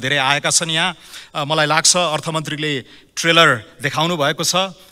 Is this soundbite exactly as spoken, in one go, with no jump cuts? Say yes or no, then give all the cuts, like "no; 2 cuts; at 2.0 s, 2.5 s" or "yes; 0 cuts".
yes; 0 cuts